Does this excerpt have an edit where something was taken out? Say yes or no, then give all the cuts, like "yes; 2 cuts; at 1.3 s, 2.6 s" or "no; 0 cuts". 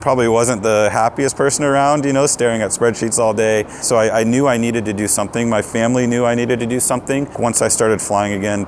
yes; 2 cuts; at 3.8 s, 7.3 s